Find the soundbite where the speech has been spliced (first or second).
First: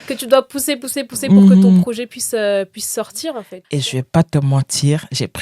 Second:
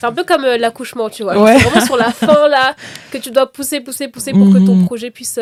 first